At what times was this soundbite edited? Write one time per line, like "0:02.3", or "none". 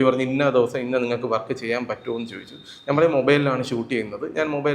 none